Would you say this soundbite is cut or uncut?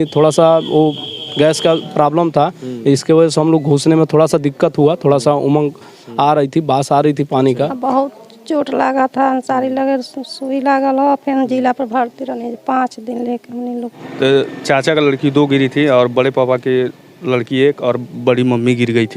cut